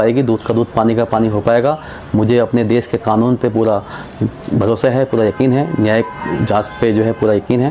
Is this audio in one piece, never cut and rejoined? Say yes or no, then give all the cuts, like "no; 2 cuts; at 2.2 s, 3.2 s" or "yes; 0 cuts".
yes; 0 cuts